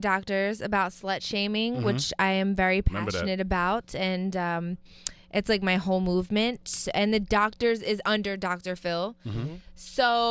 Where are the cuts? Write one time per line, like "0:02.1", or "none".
none